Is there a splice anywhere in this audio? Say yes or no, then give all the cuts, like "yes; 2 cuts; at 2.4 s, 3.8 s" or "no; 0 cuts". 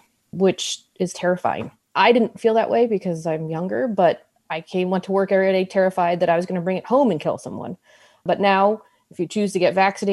no; 0 cuts